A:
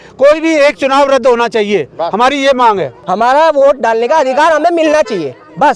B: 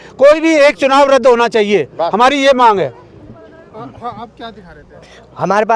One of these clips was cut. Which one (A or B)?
A